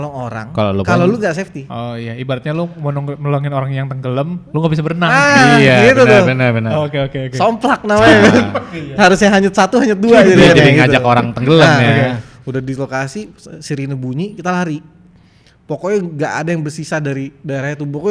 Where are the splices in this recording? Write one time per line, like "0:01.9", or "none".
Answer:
none